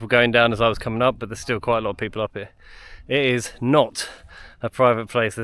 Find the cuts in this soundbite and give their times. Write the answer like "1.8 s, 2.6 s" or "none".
none